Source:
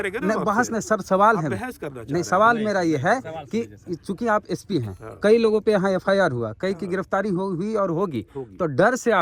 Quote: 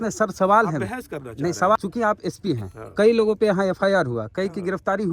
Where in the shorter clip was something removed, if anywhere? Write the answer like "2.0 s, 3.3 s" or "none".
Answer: 1.8 s